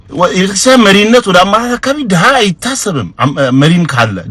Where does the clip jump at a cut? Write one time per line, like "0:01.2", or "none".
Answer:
none